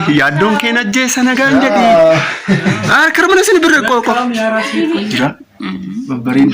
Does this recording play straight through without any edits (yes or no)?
no